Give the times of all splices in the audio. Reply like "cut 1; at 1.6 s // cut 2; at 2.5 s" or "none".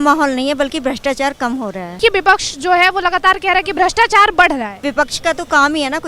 cut 1; at 2.0 s // cut 2; at 4.8 s